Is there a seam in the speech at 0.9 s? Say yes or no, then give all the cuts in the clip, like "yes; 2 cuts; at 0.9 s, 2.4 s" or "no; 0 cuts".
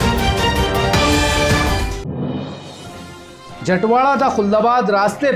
no; 1 cut; at 2.6 s